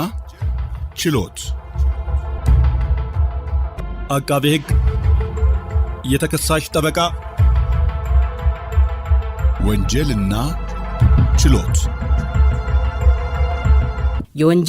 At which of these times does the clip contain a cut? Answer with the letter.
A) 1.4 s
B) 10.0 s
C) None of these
A